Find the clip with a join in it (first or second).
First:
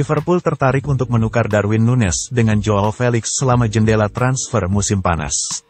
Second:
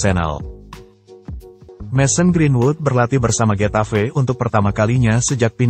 second